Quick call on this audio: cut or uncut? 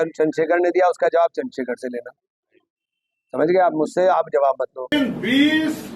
cut